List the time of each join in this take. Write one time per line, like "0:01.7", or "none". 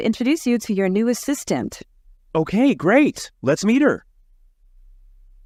none